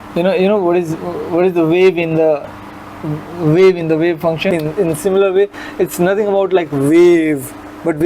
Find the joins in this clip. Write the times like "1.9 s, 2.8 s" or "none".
4.5 s